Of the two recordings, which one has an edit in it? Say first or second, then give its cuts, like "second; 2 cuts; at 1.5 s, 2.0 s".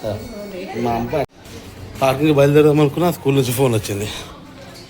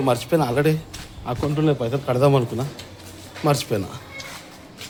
first; 1 cut; at 1.4 s